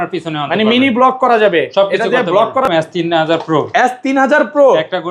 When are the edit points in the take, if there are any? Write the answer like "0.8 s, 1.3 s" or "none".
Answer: 2.6 s